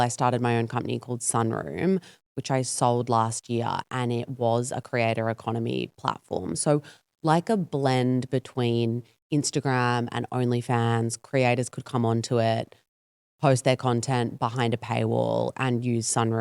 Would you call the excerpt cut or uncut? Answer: uncut